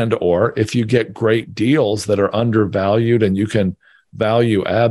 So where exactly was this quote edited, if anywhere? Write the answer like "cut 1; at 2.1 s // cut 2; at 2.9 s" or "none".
none